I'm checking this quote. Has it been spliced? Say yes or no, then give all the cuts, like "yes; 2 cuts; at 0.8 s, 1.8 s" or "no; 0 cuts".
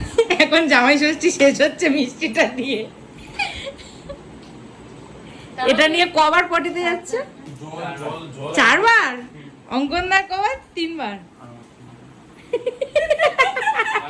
no; 0 cuts